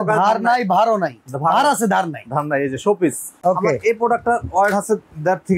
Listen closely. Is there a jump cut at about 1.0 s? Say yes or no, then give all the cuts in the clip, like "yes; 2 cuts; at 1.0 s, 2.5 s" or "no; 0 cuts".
no; 1 cut; at 3.3 s